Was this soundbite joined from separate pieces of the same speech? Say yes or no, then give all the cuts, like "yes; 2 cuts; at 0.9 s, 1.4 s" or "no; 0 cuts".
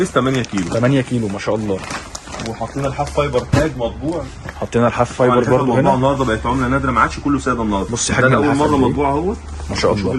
no; 0 cuts